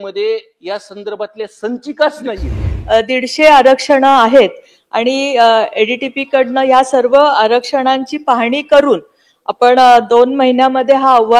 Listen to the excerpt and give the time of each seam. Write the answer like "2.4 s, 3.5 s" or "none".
2.7 s